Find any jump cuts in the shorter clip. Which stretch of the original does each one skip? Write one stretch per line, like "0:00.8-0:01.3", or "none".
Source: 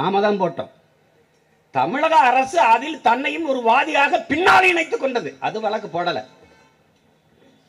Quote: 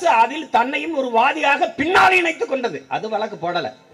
none